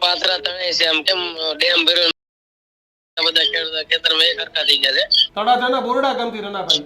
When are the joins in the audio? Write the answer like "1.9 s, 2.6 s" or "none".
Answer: 5.2 s